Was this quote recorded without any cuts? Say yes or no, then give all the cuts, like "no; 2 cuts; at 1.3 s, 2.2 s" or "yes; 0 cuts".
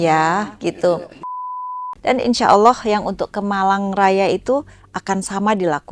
no; 1 cut; at 1.3 s